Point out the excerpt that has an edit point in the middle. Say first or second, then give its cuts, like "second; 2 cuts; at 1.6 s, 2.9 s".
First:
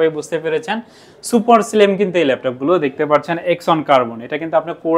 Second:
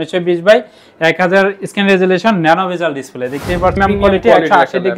second; 1 cut; at 3.8 s